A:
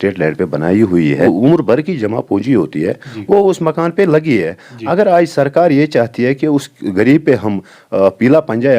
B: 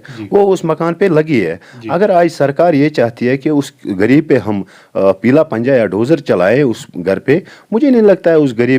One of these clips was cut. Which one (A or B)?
A